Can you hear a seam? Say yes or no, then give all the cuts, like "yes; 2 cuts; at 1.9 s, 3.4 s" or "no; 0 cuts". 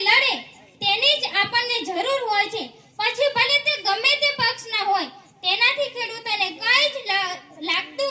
no; 0 cuts